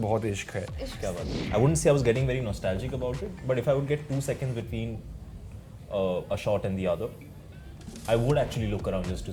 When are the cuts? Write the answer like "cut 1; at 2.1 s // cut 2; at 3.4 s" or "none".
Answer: cut 1; at 1.4 s